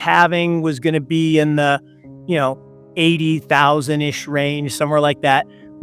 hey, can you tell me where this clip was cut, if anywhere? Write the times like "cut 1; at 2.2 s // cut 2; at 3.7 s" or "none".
none